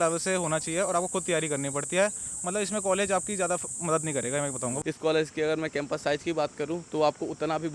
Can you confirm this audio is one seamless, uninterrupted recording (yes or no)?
no